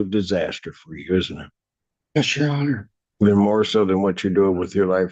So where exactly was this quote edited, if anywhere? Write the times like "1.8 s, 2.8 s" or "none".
none